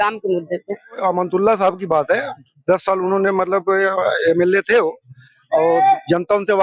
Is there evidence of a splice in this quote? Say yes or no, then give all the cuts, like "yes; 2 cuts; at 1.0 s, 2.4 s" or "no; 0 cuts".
yes; 1 cut; at 1.0 s